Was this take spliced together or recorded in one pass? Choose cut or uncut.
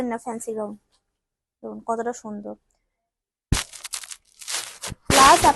uncut